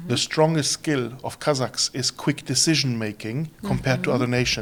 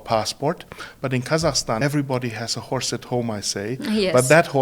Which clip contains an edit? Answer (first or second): second